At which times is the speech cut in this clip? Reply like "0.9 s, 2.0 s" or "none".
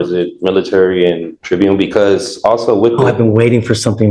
1.3 s